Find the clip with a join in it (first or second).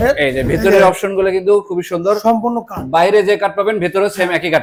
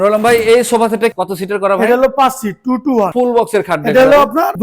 second